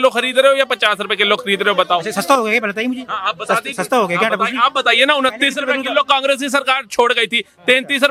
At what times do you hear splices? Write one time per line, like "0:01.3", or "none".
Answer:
none